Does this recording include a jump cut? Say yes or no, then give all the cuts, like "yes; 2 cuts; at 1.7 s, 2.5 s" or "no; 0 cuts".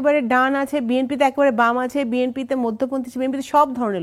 no; 0 cuts